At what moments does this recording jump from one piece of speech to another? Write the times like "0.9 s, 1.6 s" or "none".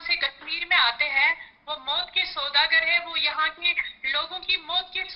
none

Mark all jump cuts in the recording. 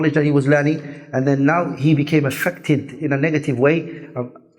none

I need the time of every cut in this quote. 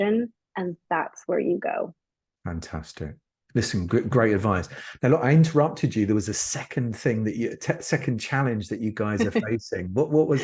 none

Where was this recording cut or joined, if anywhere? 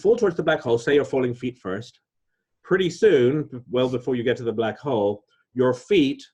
none

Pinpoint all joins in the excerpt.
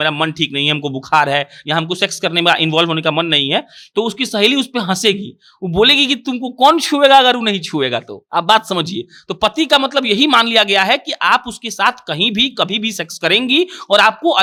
none

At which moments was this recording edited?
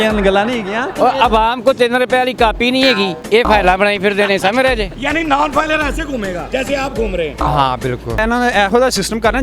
0.9 s, 3.2 s, 4.9 s, 6.4 s, 8.2 s

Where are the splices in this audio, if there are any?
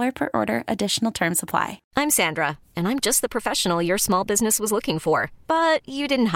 1.8 s

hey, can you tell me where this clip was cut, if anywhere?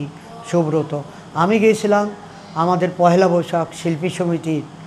none

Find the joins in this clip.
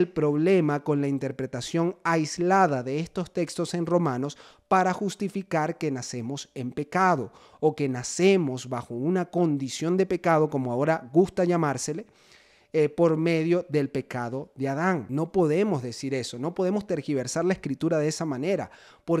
15.1 s

